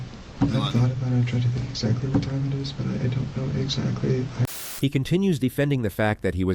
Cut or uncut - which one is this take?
cut